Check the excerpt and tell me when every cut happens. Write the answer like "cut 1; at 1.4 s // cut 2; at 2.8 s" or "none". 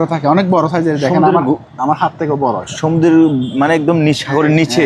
none